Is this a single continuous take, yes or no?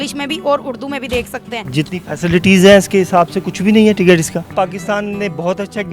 no